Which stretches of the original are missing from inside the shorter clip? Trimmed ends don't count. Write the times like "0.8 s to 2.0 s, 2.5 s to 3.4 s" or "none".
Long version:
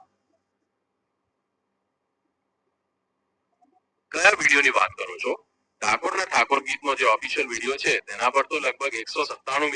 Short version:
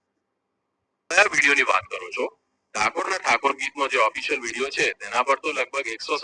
1.6 s to 4.2 s